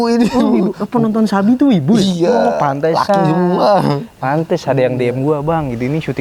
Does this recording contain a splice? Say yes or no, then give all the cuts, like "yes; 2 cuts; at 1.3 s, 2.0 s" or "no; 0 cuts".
no; 0 cuts